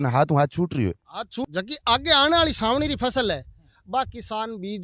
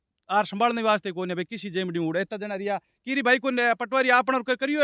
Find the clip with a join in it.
first; 1 cut; at 1.4 s

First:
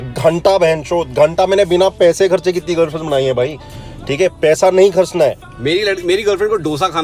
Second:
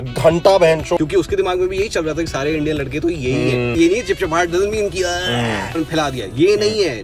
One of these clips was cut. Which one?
second; 3 cuts; at 1.0 s, 3.7 s, 5.8 s

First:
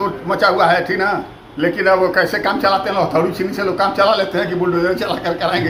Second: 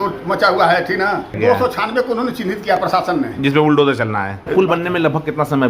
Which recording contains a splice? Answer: second; 2 cuts; at 1.4 s, 4.4 s

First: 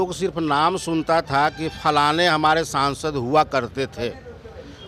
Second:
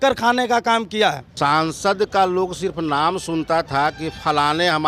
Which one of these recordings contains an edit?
second; 1 cut; at 1.3 s

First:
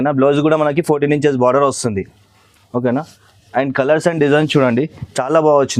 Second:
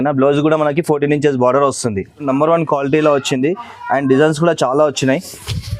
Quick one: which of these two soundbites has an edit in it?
second; 1 cut; at 2.2 s

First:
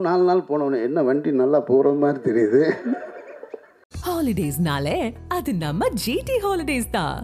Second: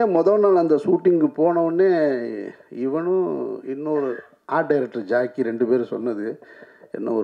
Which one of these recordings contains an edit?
first; 1 cut; at 3.9 s

